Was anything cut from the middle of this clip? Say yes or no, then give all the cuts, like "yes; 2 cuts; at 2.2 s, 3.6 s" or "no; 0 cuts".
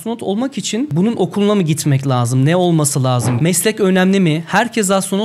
yes; 2 cuts; at 0.9 s, 3.3 s